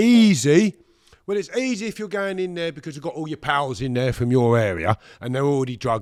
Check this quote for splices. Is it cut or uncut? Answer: uncut